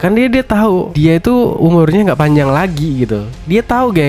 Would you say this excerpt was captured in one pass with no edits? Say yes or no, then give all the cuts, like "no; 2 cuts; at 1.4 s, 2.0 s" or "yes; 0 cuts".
no; 1 cut; at 0.9 s